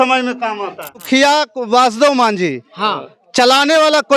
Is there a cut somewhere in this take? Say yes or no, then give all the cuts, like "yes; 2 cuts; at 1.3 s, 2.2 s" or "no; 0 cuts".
yes; 1 cut; at 1.0 s